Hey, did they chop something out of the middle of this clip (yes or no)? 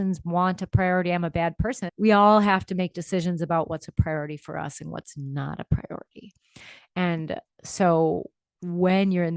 yes